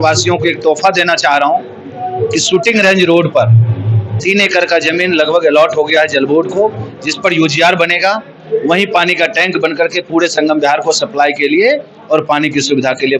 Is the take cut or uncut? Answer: uncut